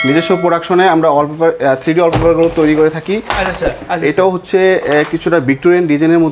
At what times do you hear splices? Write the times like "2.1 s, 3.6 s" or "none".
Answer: 3.8 s